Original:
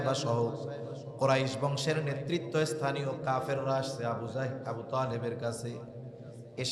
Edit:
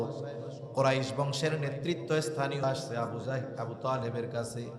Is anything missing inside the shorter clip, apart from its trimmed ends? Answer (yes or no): yes